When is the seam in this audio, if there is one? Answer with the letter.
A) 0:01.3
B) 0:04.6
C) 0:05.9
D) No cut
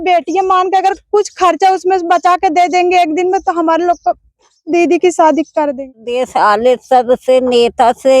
C